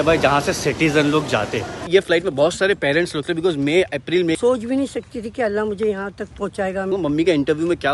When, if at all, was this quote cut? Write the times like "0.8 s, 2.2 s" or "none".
1.8 s, 4.4 s, 6.9 s